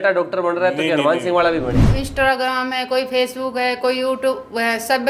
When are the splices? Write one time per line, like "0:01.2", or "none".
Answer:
0:01.8